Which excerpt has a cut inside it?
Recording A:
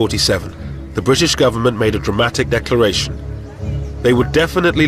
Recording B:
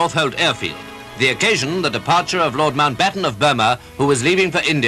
B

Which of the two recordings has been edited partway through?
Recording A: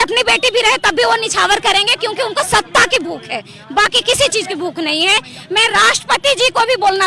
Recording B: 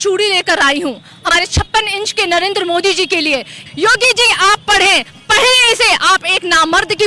B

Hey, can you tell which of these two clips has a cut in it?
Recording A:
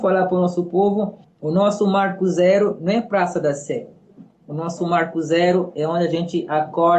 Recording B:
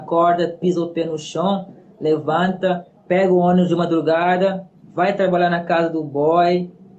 B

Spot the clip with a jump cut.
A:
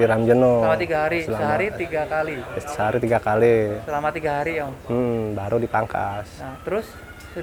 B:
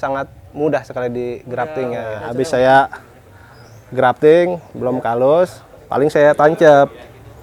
B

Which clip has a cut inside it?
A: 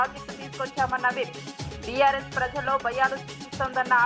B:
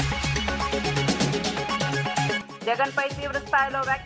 B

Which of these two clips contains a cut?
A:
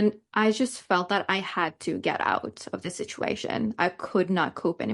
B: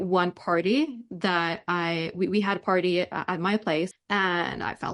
B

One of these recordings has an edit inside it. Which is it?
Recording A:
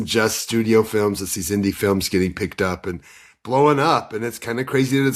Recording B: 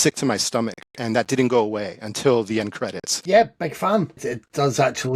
B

